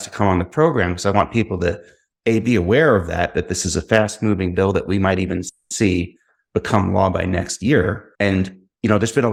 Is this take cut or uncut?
uncut